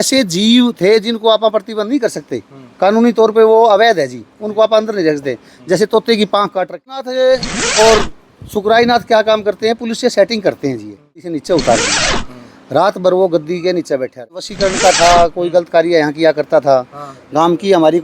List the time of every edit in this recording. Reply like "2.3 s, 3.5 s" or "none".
7.0 s, 11.3 s, 14.5 s